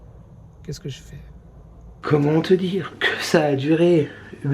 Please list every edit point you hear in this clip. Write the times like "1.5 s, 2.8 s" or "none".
2.0 s